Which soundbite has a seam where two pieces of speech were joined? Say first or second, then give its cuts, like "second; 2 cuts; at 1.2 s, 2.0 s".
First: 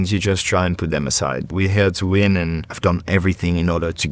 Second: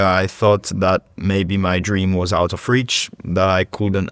first; 2 cuts; at 1.5 s, 2.8 s